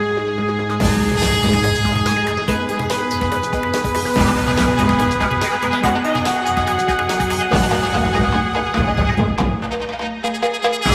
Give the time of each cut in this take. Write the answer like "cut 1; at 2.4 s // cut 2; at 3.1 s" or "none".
none